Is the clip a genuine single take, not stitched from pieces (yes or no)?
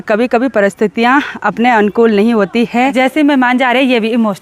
no